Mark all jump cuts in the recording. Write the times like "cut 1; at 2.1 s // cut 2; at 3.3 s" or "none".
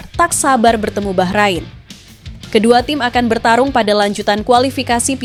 none

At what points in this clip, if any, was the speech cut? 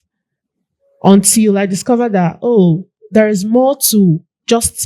cut 1; at 2.9 s

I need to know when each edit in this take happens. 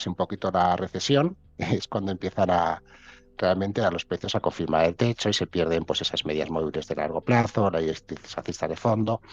none

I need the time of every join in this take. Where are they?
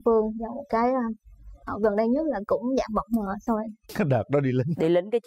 cut 1; at 3.8 s

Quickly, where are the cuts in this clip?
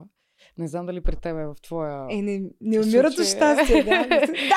none

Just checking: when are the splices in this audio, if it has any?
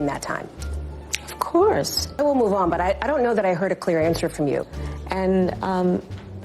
cut 1; at 2.1 s // cut 2; at 4.6 s

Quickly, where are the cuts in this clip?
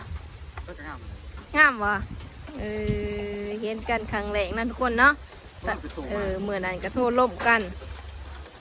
none

